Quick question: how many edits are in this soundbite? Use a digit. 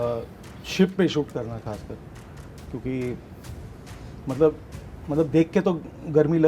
0